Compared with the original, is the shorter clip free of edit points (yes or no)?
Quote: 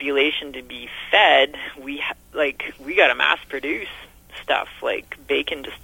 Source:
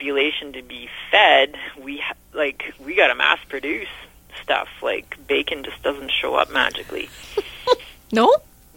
yes